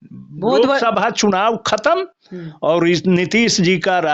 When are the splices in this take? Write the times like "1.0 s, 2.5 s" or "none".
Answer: none